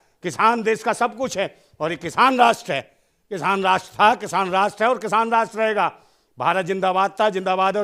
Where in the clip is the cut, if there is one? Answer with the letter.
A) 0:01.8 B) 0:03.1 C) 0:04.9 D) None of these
D